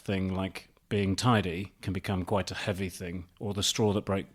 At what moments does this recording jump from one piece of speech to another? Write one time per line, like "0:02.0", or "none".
none

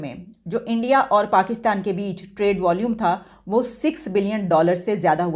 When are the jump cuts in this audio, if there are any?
none

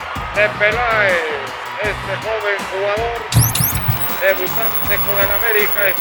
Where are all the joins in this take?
none

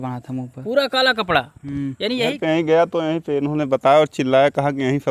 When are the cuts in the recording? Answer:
0:02.3

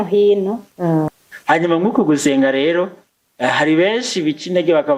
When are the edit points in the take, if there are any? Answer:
0:01.1

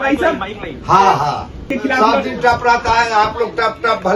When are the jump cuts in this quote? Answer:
0:01.7

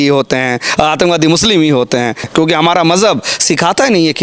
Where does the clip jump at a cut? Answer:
0:02.3

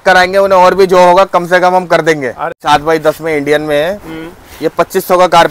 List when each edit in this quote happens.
0:02.6

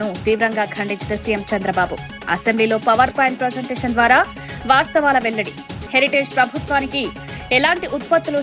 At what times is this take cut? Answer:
none

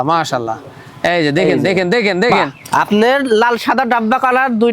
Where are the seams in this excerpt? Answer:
0:02.5

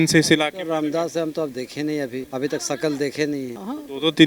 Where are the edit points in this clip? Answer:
none

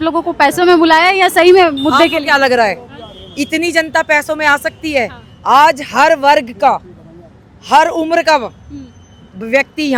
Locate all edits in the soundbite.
none

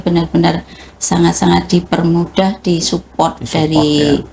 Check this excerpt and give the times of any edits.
none

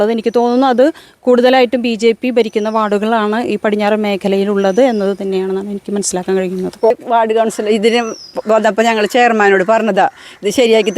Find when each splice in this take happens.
0:06.9

